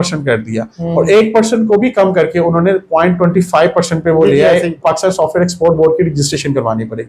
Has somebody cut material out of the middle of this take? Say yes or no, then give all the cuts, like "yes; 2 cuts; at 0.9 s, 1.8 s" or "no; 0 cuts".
yes; 1 cut; at 4.8 s